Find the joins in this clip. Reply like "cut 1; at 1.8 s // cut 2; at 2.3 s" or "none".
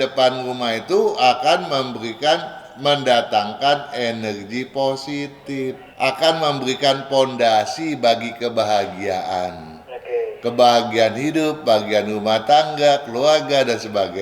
cut 1; at 5.8 s